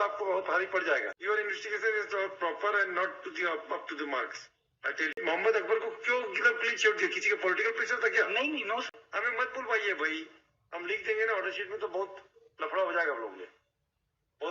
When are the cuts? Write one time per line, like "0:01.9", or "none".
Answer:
0:01.1
0:05.2
0:08.9